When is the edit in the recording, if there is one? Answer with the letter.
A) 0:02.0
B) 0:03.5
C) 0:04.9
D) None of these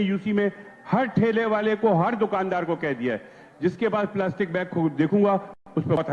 D